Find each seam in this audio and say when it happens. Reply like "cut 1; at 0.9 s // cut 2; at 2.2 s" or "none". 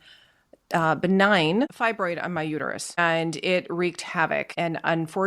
cut 1; at 1.7 s // cut 2; at 3.0 s // cut 3; at 4.5 s